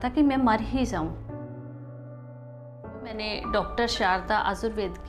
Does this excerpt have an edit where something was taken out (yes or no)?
yes